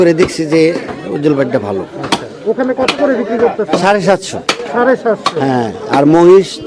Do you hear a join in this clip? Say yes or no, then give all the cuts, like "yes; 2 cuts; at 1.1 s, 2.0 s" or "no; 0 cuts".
no; 0 cuts